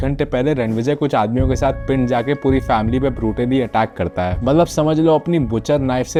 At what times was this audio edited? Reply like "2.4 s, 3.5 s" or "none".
none